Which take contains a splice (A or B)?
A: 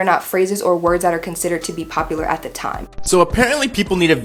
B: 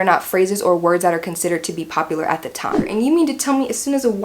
B